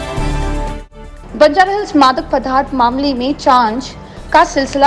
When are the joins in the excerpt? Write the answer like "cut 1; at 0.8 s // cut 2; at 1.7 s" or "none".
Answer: cut 1; at 0.9 s